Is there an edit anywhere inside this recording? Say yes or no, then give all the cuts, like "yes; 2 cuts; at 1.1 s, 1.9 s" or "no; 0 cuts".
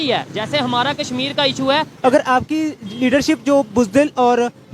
yes; 1 cut; at 1.9 s